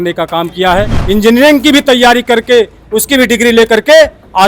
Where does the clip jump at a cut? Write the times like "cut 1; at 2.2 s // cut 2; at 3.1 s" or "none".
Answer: cut 1; at 1.0 s